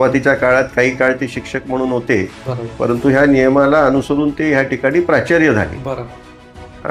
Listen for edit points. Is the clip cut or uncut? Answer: uncut